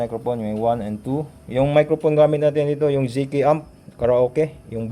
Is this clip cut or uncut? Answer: uncut